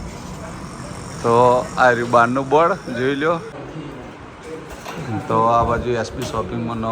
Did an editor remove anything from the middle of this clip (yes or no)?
yes